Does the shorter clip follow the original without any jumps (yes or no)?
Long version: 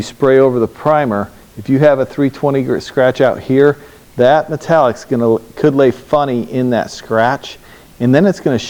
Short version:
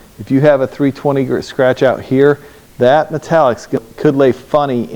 no